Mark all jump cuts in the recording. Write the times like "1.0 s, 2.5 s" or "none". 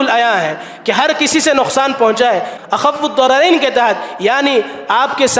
2.5 s